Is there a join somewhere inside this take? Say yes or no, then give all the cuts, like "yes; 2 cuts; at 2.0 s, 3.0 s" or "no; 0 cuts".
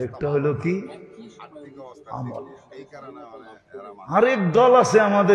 yes; 2 cuts; at 2.6 s, 4.0 s